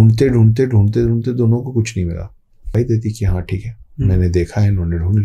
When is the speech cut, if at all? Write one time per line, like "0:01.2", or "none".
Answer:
0:02.7